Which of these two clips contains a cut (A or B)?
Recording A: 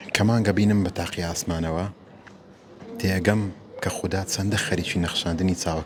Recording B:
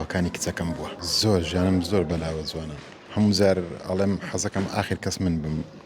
B